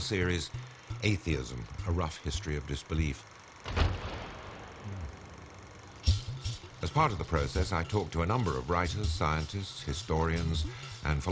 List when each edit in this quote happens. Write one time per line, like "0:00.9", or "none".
none